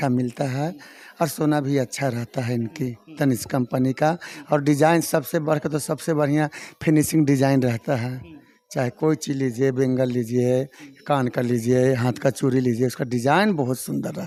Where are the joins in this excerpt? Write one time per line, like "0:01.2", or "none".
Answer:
none